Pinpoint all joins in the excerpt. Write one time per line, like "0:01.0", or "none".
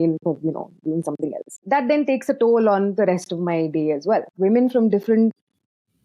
0:01.6
0:04.3